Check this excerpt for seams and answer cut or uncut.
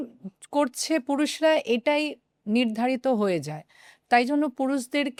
uncut